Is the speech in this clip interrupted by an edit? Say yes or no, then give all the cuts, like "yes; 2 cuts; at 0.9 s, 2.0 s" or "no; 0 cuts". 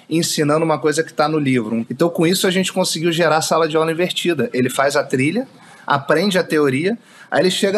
yes; 1 cut; at 1.9 s